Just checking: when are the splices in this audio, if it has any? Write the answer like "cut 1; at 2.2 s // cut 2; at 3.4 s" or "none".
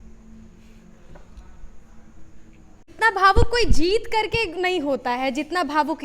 cut 1; at 2.9 s